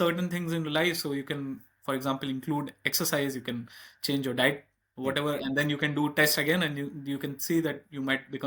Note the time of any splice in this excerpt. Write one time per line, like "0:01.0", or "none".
none